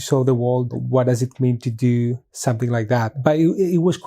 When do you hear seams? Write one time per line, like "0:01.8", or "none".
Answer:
0:03.2